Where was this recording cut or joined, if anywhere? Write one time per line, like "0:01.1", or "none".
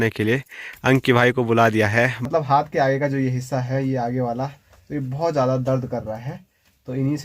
0:02.2